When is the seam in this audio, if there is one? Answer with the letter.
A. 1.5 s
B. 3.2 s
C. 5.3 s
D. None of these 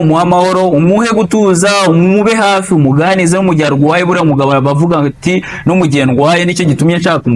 D